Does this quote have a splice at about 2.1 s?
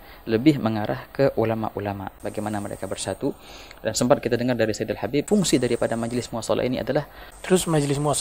yes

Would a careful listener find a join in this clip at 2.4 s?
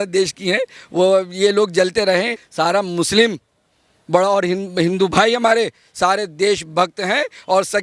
yes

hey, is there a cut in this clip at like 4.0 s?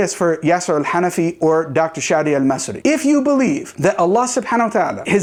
no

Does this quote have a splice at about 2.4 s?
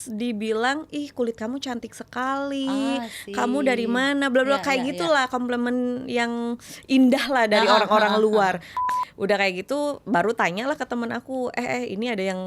no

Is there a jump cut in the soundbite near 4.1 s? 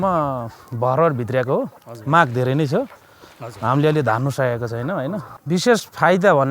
no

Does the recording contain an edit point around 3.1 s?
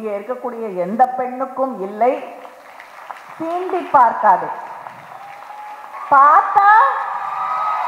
no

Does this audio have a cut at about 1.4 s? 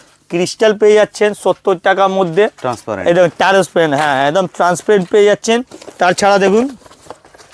no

